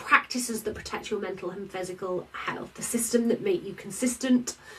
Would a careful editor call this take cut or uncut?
uncut